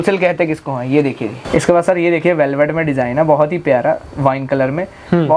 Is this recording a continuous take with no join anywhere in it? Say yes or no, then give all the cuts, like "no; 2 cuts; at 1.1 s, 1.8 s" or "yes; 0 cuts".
yes; 0 cuts